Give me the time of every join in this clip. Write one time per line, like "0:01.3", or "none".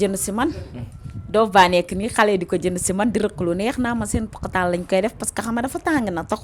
none